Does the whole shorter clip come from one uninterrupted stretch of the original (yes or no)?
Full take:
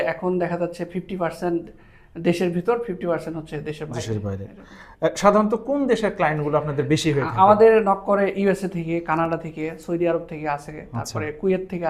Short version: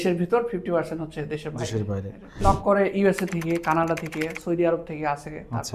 no